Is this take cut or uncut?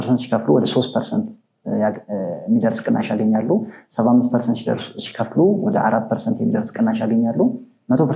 uncut